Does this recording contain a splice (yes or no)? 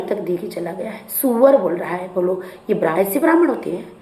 yes